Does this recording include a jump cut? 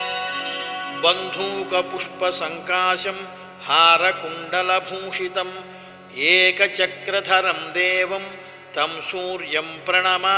yes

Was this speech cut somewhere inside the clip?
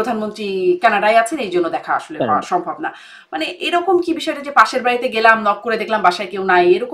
no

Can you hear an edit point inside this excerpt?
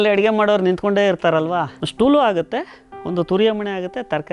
yes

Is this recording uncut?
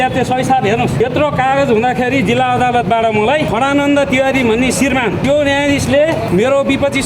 no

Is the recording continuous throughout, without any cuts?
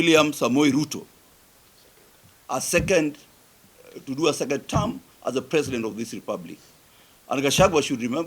yes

